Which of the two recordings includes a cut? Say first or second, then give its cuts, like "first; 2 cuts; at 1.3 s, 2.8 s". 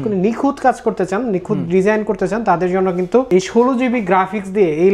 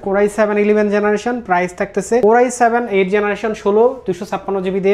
second; 1 cut; at 2.2 s